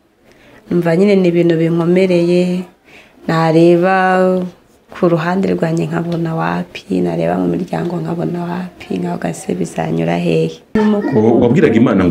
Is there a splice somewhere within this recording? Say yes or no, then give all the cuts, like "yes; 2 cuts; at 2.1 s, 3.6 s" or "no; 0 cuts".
yes; 1 cut; at 10.8 s